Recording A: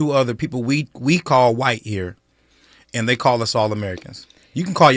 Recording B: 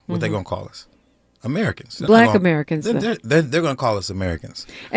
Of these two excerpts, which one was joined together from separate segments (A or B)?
B